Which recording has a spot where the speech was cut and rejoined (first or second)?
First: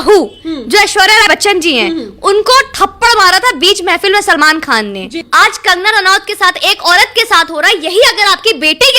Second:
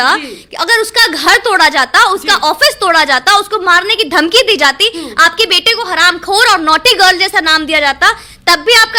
first